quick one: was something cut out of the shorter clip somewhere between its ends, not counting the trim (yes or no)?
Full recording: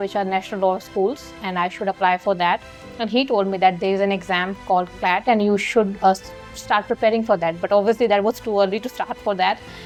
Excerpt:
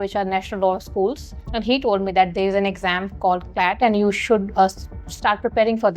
yes